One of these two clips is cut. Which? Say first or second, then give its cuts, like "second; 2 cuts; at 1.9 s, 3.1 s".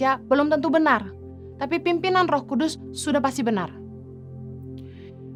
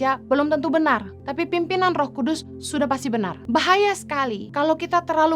second; 3 cuts; at 1.2 s, 3.4 s, 4.4 s